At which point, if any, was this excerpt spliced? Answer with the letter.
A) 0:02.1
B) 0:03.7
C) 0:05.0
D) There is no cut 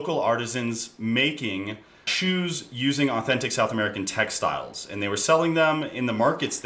A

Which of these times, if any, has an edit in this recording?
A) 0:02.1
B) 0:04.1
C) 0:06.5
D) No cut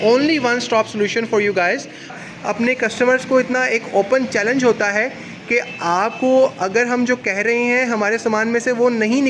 A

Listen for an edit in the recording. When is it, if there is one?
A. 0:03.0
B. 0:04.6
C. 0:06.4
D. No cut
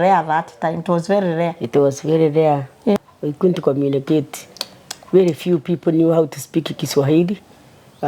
A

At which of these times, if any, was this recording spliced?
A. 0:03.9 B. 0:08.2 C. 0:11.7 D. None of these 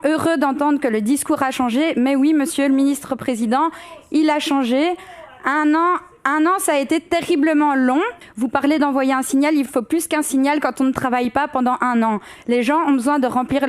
B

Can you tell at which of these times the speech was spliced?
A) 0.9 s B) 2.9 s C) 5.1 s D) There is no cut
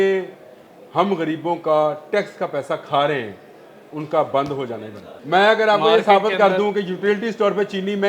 C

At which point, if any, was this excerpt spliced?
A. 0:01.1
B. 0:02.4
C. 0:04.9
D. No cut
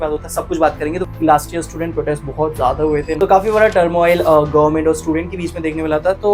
A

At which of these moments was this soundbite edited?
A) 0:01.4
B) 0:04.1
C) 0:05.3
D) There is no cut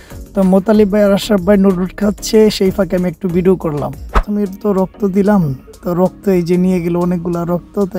B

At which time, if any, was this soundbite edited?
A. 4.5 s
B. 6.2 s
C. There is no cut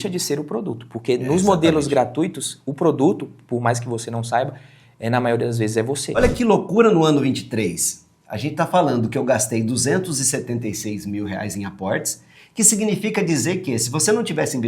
B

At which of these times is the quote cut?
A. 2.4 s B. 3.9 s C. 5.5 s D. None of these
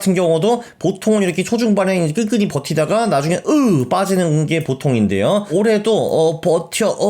C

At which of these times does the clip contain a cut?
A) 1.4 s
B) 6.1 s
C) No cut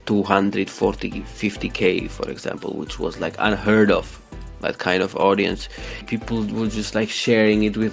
B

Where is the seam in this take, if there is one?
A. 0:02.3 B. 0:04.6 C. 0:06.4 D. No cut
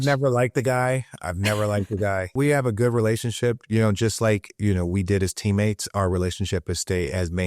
A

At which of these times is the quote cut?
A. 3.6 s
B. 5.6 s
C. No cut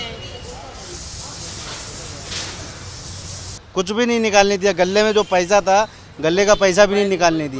A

